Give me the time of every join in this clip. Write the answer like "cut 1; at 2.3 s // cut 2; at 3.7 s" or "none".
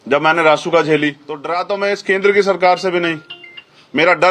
cut 1; at 1.5 s